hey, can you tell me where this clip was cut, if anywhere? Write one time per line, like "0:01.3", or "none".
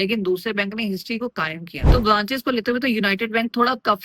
0:01.9

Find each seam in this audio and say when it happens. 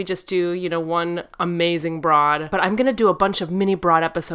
0:02.5

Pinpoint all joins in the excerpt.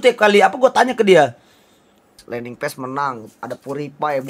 0:02.2

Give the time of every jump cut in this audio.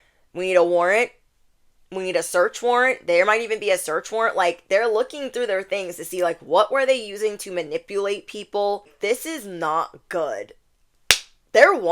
0:08.9

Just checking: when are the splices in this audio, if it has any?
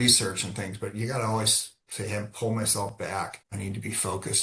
0:03.4

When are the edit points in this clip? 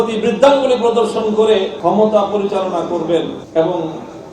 0:01.8
0:03.4

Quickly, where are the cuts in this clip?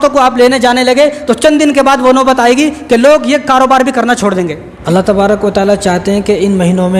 0:04.7

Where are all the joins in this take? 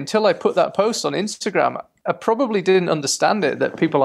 none

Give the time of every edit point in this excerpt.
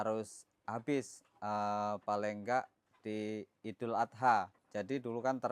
0:04.6

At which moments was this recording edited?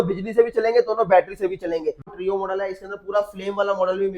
0:02.1

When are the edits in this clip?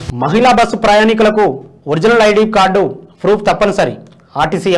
none

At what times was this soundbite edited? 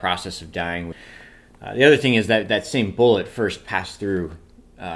0:01.0

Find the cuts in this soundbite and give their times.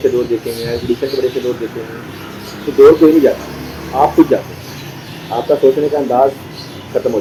none

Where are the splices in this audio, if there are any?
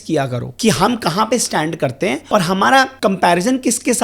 0:02.2
0:02.9

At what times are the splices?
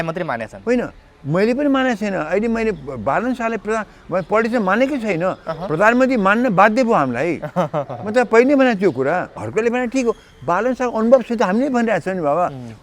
0:09.4

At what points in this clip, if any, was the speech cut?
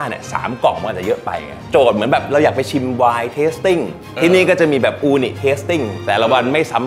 0:01.6
0:05.9

